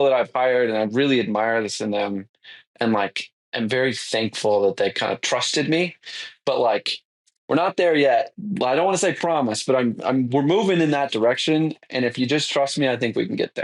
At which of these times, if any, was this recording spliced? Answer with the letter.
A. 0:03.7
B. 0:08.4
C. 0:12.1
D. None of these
B